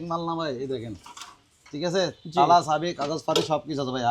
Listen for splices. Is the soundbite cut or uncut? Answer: uncut